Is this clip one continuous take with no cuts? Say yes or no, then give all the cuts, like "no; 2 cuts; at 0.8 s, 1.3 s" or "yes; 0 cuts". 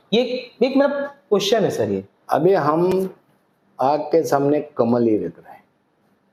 yes; 0 cuts